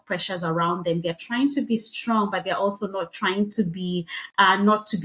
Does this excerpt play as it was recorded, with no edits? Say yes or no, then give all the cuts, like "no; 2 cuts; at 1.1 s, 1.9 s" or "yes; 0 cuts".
yes; 0 cuts